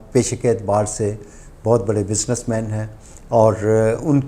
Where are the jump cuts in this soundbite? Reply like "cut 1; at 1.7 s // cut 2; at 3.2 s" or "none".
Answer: none